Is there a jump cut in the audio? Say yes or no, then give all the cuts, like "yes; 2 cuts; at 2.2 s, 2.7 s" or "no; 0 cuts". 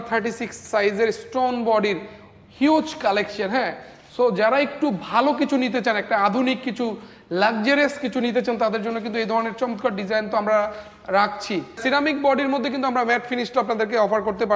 yes; 1 cut; at 11.8 s